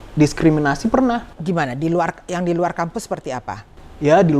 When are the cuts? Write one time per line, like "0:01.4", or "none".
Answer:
none